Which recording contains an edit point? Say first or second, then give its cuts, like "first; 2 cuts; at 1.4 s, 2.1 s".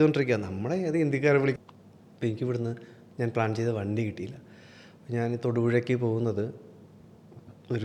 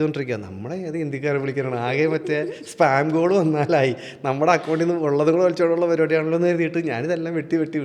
first; 1 cut; at 1.5 s